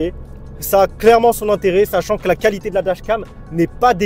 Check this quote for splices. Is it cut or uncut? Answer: uncut